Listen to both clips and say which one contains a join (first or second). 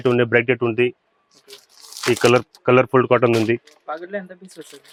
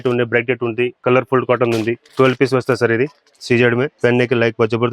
second